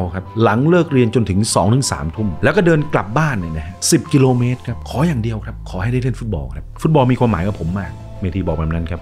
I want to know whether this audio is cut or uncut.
cut